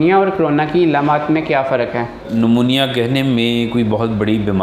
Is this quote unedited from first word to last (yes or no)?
no